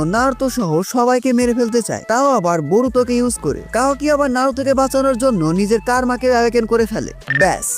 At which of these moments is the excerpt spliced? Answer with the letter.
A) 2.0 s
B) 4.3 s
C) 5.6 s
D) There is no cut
A